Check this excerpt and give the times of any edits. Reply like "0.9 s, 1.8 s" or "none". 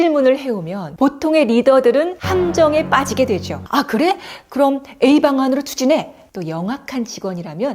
3.6 s, 6.2 s